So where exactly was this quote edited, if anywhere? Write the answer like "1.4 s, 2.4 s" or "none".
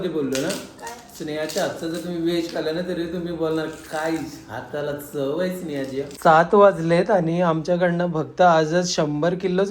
6.1 s